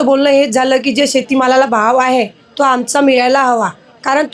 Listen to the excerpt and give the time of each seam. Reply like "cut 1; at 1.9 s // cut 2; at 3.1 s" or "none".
none

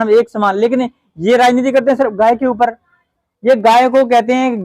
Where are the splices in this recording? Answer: none

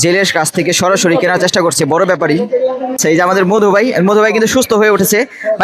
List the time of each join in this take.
cut 1; at 3.0 s

